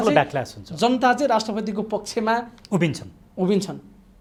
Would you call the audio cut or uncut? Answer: uncut